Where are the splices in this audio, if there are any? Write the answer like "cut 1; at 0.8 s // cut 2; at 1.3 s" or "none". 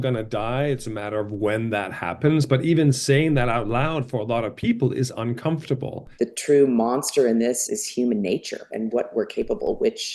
cut 1; at 6.0 s // cut 2; at 7.6 s // cut 3; at 8.7 s